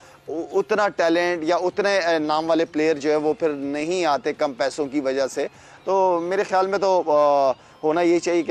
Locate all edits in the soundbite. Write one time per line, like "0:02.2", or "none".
none